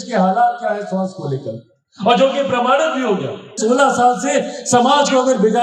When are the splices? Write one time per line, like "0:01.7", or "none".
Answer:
0:03.6